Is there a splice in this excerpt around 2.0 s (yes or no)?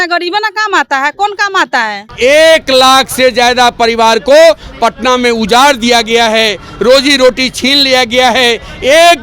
yes